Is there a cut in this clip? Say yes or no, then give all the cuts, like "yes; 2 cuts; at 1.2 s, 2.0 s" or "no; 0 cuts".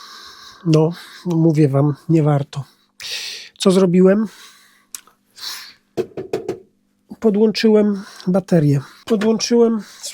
no; 0 cuts